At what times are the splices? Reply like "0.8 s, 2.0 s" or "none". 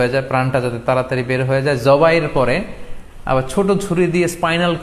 none